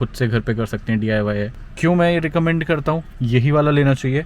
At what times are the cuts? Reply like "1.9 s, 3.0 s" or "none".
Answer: 1.6 s, 3.1 s